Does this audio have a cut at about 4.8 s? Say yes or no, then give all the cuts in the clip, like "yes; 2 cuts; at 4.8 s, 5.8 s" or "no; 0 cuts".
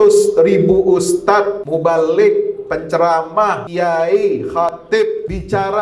yes; 3 cuts; at 1.6 s, 3.6 s, 4.8 s